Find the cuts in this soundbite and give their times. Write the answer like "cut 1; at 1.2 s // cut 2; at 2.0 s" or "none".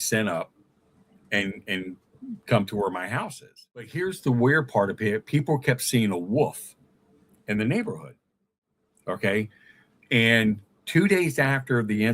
cut 1; at 3.9 s